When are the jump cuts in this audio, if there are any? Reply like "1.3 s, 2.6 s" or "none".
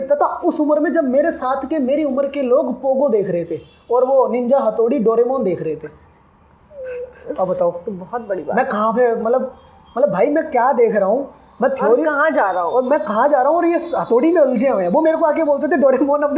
none